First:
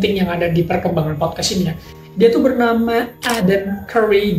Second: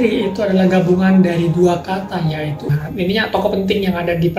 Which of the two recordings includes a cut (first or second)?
second